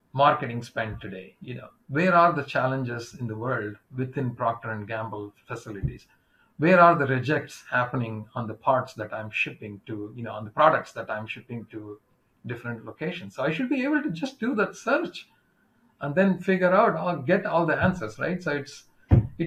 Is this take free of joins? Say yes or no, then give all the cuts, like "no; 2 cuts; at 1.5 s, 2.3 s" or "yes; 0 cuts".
yes; 0 cuts